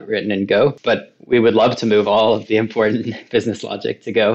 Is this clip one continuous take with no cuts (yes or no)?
yes